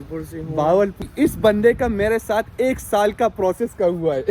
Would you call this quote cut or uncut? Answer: cut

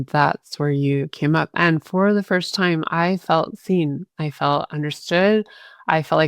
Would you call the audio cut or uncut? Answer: cut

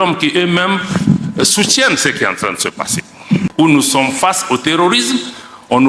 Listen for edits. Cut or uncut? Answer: cut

